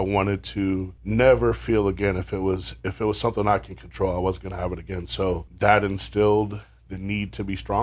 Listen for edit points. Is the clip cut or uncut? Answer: cut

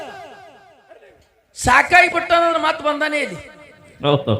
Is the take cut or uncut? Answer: uncut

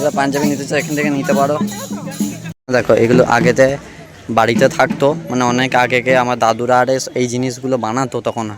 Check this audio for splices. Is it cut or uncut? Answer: cut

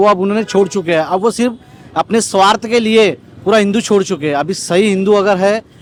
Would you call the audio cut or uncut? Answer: uncut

